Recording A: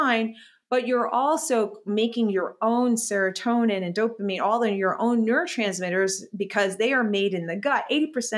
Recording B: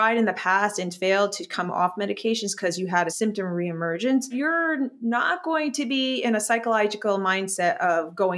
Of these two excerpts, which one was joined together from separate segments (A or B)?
B